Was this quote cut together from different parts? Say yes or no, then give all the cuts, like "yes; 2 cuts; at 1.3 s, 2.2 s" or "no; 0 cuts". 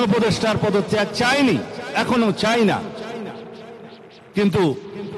no; 0 cuts